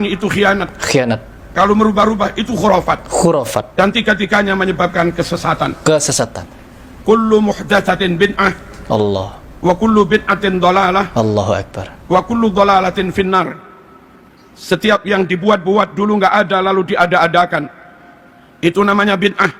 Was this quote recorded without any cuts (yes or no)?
yes